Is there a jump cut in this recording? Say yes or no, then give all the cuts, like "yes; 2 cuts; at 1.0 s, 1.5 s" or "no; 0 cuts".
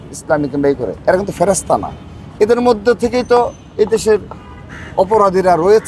no; 0 cuts